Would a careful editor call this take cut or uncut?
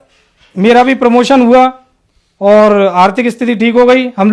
uncut